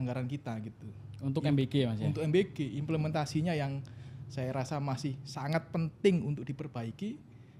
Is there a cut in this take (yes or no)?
no